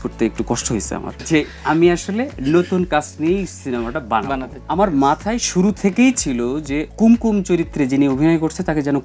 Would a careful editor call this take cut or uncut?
cut